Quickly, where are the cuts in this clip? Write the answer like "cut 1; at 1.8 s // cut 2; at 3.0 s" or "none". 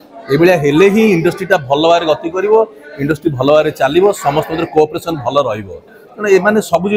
none